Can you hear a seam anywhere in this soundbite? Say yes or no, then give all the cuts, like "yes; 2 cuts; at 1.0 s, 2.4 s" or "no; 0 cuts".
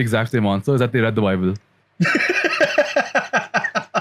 no; 0 cuts